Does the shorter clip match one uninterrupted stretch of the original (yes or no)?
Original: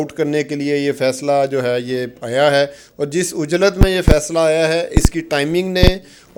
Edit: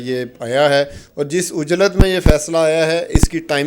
yes